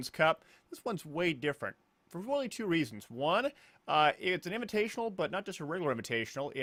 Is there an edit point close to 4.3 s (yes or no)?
no